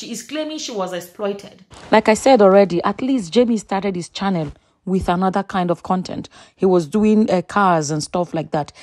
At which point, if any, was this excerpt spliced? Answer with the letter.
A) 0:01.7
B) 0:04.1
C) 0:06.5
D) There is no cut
A